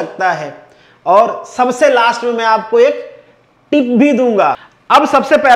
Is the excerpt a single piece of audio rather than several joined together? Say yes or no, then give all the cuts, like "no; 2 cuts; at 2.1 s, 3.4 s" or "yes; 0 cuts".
no; 1 cut; at 4.7 s